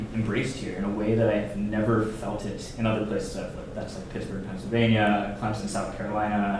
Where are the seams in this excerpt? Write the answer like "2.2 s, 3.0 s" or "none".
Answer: none